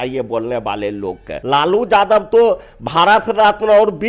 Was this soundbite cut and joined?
yes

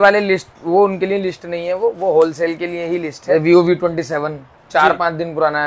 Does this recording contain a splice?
yes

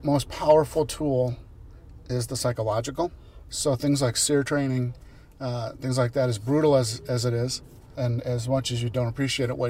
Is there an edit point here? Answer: yes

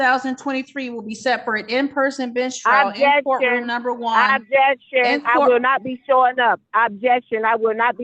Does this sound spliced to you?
no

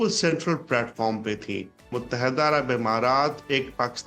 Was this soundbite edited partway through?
yes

